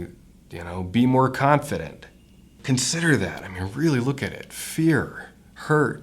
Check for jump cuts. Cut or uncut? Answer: cut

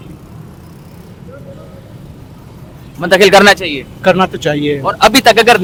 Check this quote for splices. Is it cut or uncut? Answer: uncut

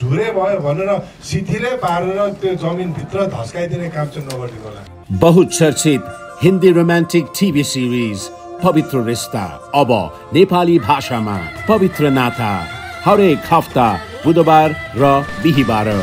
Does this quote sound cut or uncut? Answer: cut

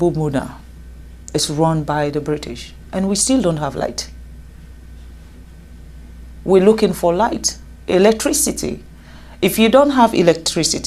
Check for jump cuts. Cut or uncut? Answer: uncut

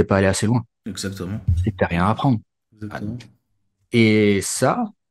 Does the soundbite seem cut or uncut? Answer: uncut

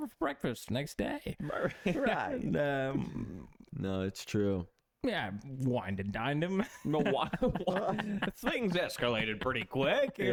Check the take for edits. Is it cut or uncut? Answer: uncut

